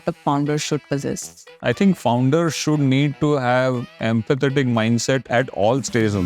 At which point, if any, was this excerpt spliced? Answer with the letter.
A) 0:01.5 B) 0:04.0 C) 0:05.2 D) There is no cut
A